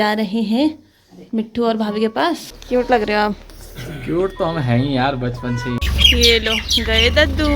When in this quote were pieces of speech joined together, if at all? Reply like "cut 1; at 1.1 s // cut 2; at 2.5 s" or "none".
cut 1; at 2.5 s // cut 2; at 5.8 s